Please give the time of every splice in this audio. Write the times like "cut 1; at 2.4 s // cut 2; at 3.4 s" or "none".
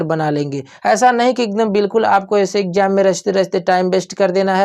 none